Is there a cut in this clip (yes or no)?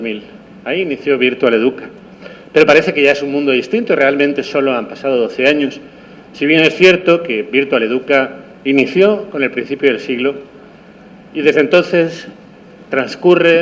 yes